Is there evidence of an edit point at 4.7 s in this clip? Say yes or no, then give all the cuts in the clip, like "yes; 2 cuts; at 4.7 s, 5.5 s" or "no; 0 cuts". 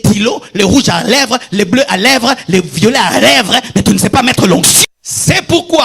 yes; 1 cut; at 4.7 s